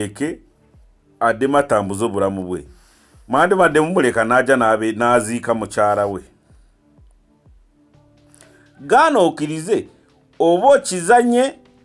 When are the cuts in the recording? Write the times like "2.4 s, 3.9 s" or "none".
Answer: 6.3 s, 8.7 s